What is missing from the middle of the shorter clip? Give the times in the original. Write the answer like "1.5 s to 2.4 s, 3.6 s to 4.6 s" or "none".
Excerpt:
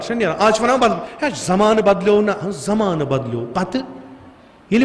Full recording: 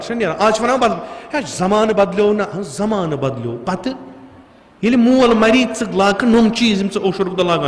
1.1 s to 1.2 s